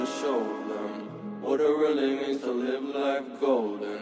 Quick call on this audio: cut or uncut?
uncut